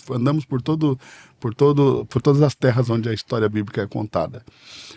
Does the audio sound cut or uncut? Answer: uncut